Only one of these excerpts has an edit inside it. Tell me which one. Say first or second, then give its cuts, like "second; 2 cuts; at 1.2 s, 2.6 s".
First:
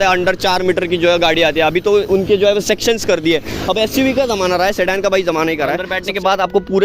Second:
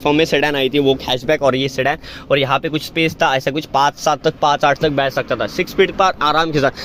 first; 1 cut; at 5.9 s